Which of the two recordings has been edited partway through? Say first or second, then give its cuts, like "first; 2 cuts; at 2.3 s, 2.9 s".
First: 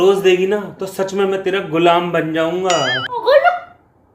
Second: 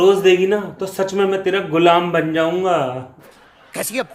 first; 1 cut; at 3.2 s